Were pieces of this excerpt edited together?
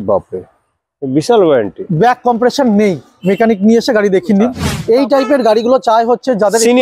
yes; 1 cut; at 4.7 s

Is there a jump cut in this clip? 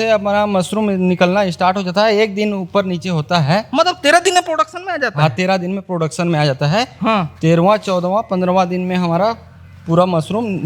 no; 0 cuts

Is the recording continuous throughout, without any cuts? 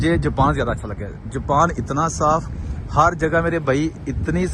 yes; 0 cuts

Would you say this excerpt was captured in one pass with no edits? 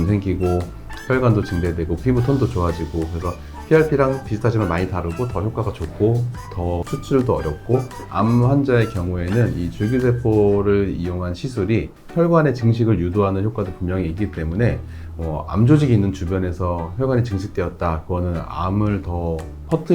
no; 1 cut; at 8.1 s

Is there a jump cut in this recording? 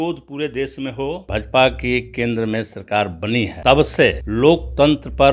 yes; 3 cuts; at 1.2 s, 3.5 s, 4.2 s

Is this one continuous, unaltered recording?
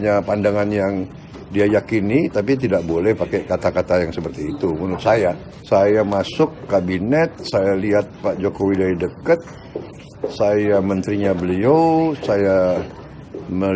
yes; 0 cuts

